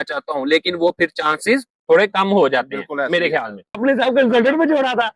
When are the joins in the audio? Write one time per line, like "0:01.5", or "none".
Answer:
0:03.8